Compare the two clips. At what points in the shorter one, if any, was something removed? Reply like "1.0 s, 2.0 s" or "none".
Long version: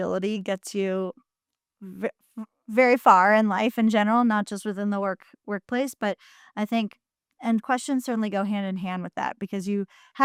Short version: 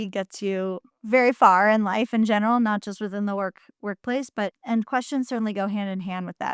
0.9 s, 4.6 s